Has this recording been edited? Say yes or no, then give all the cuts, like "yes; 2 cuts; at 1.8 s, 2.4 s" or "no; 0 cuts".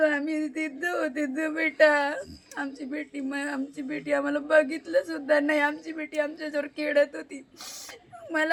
no; 0 cuts